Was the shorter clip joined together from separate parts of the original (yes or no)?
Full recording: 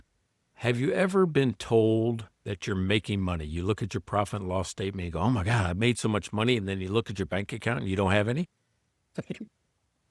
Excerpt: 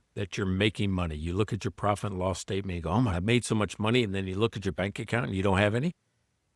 yes